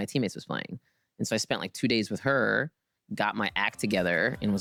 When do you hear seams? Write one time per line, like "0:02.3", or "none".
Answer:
none